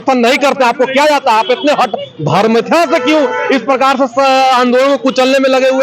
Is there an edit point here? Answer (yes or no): no